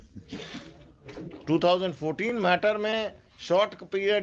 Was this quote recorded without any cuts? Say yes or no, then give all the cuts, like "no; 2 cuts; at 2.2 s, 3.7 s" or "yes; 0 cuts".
yes; 0 cuts